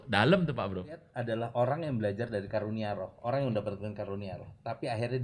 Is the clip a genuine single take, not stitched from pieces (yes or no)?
no